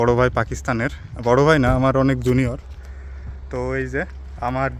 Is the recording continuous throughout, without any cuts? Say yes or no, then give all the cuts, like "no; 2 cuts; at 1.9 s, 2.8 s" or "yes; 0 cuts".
yes; 0 cuts